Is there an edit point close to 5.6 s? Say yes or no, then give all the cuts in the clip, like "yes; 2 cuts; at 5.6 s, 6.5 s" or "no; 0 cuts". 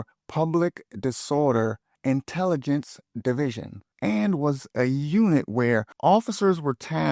no; 1 cut; at 3.9 s